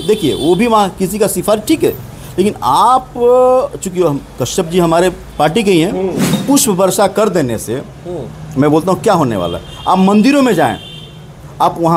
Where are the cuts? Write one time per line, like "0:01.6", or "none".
0:06.4